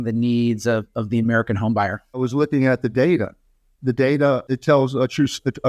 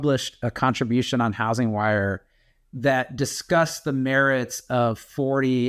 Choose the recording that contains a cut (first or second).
first